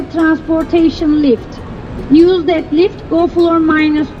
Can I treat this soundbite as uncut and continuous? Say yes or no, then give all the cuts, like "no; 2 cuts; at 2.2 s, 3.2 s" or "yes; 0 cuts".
yes; 0 cuts